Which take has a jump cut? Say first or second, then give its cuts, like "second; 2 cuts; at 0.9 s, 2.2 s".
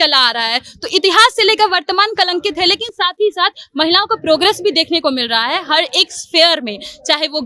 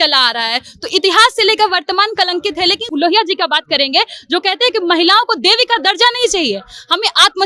second; 1 cut; at 2.8 s